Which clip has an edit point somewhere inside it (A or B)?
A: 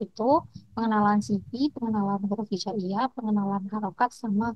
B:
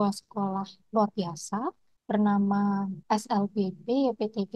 B